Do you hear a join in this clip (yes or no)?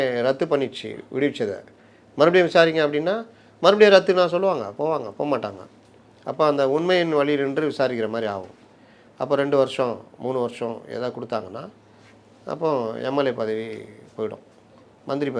no